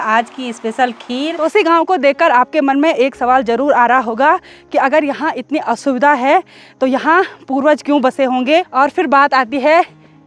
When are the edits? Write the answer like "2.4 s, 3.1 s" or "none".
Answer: 1.4 s, 8.7 s